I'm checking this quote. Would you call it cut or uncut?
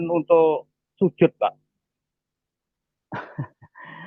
uncut